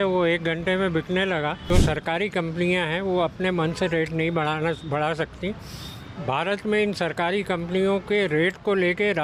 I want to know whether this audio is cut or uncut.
cut